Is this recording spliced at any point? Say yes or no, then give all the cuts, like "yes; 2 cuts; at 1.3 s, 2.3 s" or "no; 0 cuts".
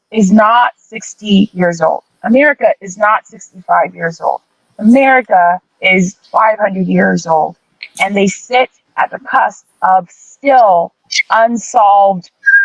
no; 0 cuts